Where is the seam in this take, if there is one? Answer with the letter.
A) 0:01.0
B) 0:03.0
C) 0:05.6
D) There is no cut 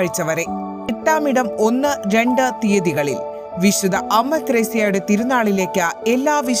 A